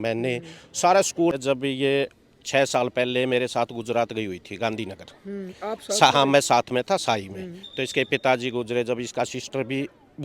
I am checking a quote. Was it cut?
yes; 1 cut; at 1.3 s

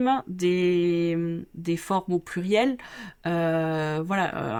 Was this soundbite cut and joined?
no; 0 cuts

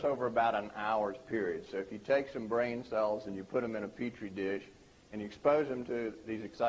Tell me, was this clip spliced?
yes; 1 cut; at 3.6 s

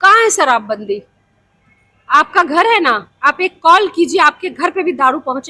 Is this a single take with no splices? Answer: yes; 0 cuts

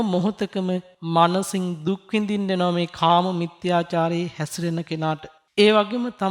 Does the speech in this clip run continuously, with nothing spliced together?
no; 1 cut; at 0.9 s

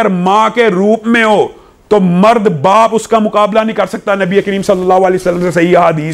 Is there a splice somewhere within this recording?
no; 0 cuts

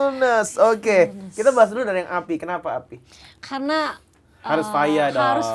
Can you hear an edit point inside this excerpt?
no; 0 cuts

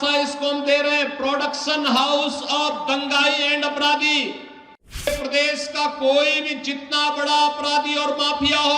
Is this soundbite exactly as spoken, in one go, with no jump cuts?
no; 1 cut; at 5.1 s

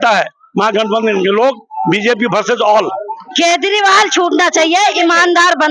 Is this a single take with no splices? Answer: no; 1 cut; at 3.3 s

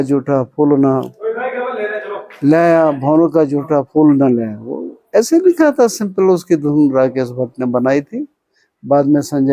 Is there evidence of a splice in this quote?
no; 0 cuts

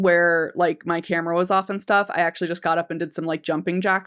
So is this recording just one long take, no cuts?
yes; 0 cuts

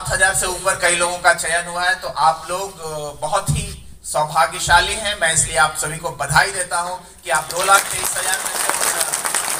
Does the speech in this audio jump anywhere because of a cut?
no; 0 cuts

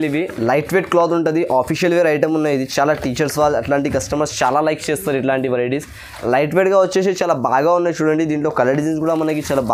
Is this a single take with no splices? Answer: yes; 0 cuts

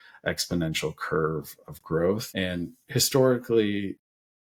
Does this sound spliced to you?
no; 0 cuts

